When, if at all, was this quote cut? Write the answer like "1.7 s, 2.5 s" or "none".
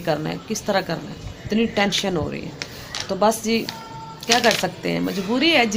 none